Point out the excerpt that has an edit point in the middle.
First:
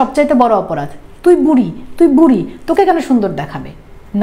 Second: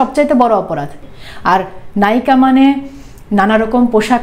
second; 1 cut; at 1.0 s

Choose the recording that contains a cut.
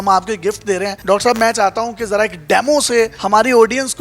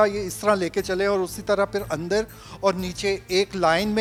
first; 2 cuts; at 0.9 s, 3.2 s

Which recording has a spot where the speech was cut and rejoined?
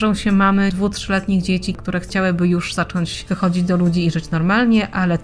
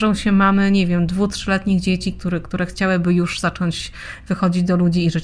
first; 3 cuts; at 0.7 s, 1.8 s, 3.2 s

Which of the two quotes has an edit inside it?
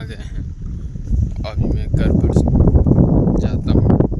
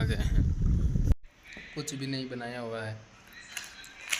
second; 1 cut; at 1.1 s

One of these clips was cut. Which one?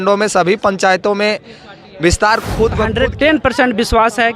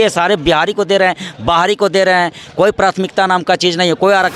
first; 1 cut; at 3.3 s

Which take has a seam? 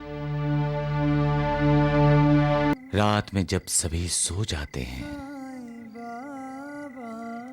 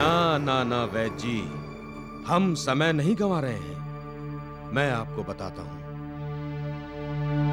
first; 1 cut; at 2.7 s

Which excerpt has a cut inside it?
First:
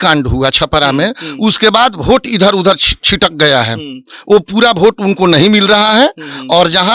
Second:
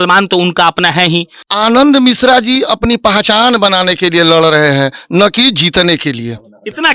second; 1 cut; at 1.4 s

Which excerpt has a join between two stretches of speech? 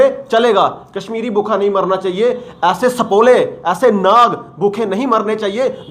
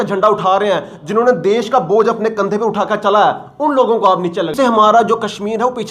second; 1 cut; at 4.5 s

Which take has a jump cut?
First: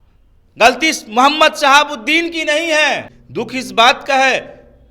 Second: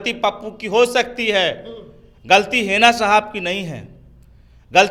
first; 1 cut; at 3.2 s

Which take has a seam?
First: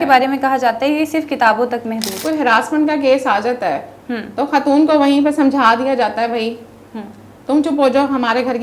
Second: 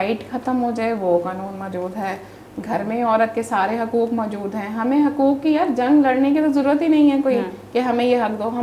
first; 1 cut; at 2.2 s

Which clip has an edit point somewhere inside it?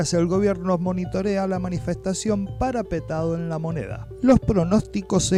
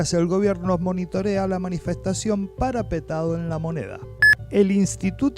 second; 1 cut; at 4.0 s

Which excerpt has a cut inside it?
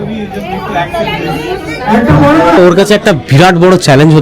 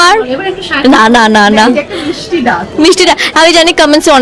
first; 1 cut; at 2.6 s

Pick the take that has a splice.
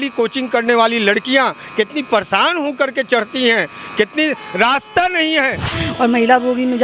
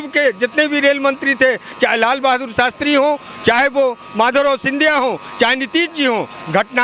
first; 1 cut; at 5.7 s

